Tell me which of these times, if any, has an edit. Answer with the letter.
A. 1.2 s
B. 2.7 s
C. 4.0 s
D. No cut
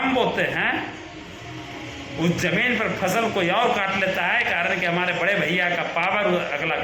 D